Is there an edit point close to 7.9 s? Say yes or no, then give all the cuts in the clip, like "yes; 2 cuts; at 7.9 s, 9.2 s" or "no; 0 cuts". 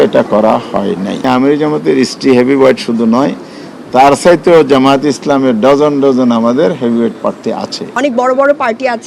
yes; 2 cuts; at 1.2 s, 7.9 s